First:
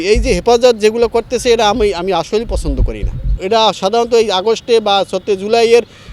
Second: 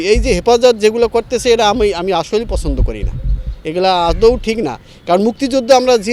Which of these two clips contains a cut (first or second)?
first